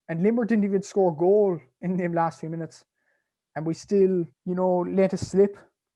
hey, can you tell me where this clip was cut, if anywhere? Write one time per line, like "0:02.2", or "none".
0:04.4